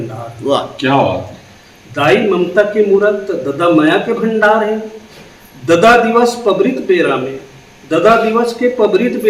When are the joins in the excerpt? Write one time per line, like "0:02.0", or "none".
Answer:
none